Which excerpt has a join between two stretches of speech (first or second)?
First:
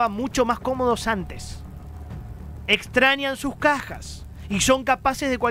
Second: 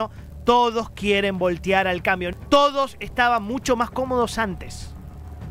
second